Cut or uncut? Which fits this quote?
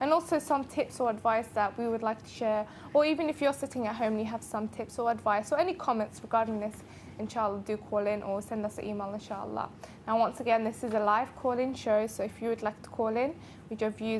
cut